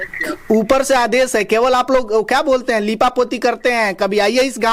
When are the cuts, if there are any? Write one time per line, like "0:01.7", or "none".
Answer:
none